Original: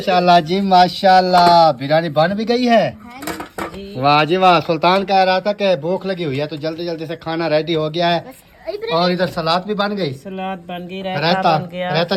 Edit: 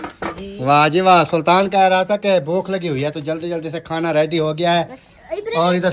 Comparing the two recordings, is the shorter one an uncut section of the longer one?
yes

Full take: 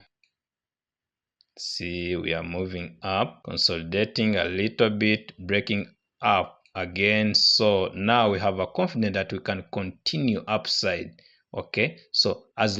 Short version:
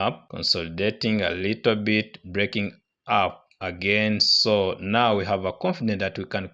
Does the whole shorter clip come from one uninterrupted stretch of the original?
yes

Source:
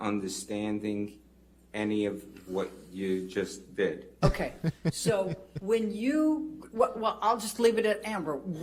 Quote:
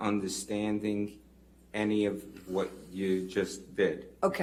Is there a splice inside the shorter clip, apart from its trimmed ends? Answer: no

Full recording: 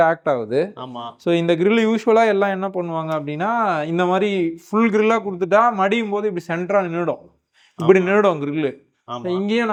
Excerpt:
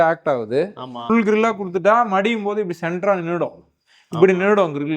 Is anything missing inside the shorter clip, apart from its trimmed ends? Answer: yes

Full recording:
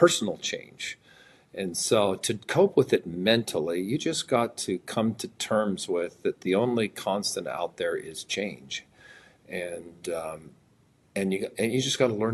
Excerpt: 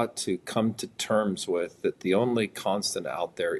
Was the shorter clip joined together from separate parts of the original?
no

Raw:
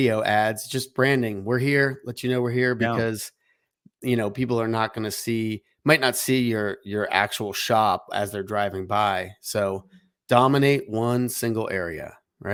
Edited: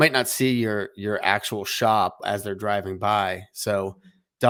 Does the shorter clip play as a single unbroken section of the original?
yes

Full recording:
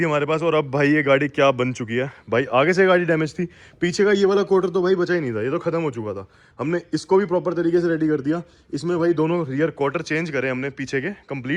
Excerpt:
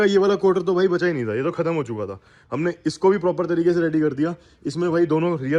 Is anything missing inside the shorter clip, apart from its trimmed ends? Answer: no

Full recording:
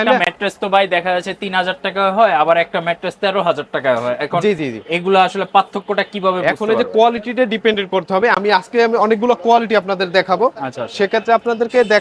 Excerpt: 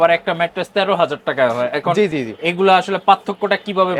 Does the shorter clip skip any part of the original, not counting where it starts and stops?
no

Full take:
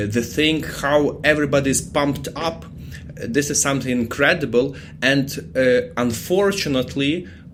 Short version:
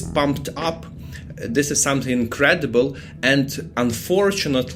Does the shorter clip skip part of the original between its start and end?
yes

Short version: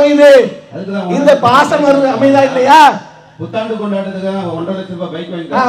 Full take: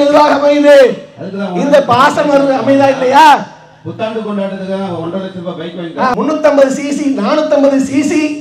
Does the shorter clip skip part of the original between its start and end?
no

